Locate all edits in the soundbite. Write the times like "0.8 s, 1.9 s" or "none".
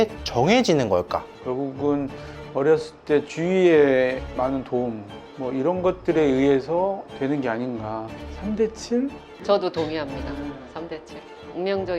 1.3 s